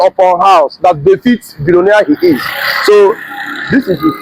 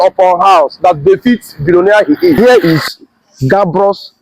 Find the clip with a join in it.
second; 1 cut; at 2.4 s

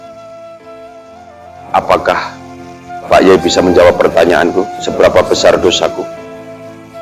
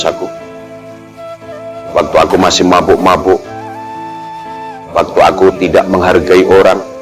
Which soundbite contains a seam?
first; 1 cut; at 1.4 s

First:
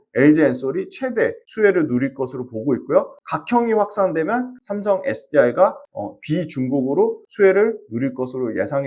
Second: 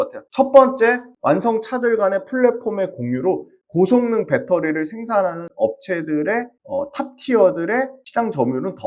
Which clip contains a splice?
second; 1 cut; at 1.1 s

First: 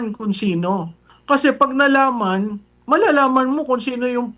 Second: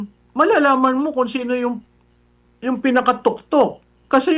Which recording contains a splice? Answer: first; 1 cut; at 1.1 s

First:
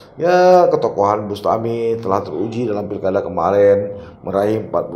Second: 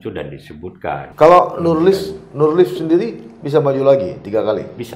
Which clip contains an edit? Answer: second; 1 cut; at 1.1 s

